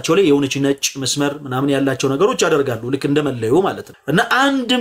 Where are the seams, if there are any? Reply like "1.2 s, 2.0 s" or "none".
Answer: 3.9 s

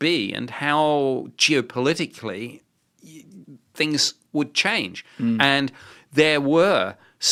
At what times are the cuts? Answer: none

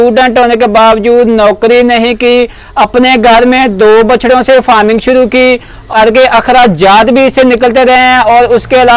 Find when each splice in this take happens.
6.0 s

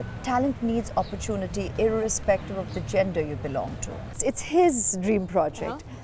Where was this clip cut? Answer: 4.2 s

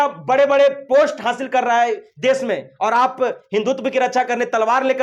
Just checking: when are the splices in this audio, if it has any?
none

